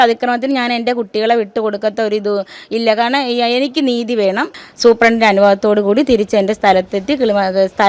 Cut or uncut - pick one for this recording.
cut